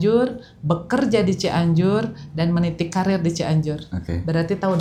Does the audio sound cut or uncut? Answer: uncut